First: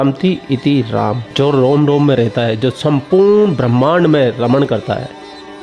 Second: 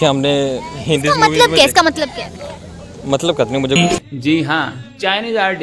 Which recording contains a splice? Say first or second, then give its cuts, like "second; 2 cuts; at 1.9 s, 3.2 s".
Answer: second; 1 cut; at 3.8 s